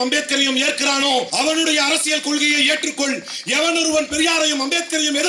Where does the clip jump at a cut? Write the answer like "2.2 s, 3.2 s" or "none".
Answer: 1.3 s